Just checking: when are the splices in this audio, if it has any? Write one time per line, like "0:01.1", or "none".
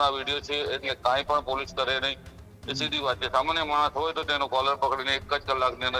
none